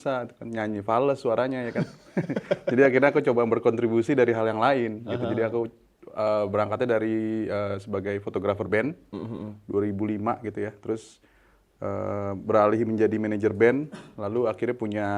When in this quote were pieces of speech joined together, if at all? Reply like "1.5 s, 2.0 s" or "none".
none